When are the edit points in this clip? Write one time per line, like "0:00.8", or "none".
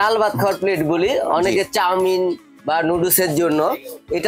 none

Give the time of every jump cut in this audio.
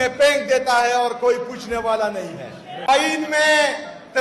0:02.9

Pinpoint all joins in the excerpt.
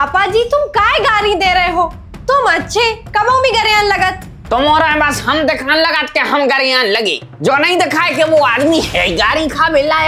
none

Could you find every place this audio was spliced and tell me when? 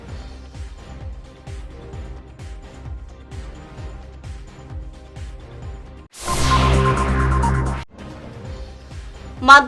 0:07.8
0:08.8

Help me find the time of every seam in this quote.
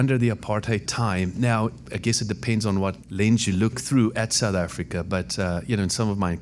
0:00.9
0:01.8
0:03.0
0:03.8

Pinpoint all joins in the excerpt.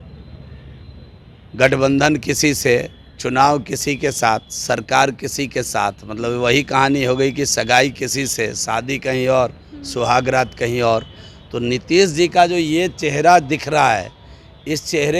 none

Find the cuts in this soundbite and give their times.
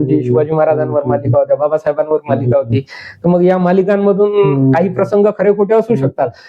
none

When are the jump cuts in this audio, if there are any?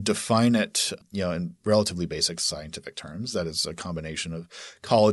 0:01.0

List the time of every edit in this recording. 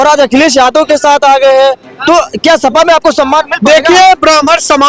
none

